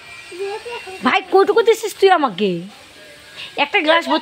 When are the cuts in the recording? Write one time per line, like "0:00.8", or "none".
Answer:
none